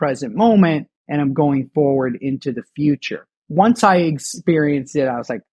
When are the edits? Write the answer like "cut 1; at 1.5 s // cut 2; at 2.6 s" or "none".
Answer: cut 1; at 3.4 s